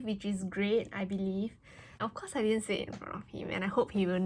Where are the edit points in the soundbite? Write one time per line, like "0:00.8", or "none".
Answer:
0:02.0